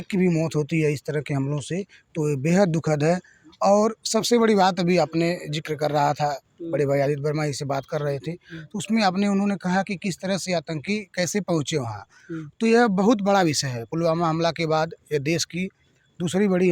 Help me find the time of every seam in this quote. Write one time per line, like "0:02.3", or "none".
none